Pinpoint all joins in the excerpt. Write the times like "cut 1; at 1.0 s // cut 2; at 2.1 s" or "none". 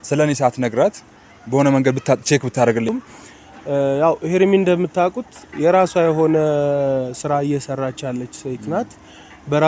cut 1; at 2.9 s